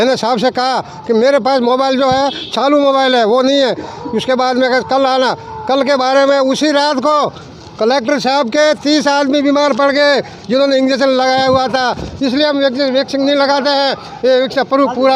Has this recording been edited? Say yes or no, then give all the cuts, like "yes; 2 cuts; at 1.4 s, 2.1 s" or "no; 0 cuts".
no; 0 cuts